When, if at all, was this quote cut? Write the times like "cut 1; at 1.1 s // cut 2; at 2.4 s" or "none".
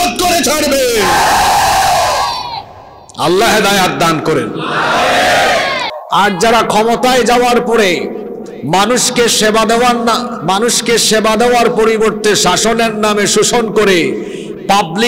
cut 1; at 5.9 s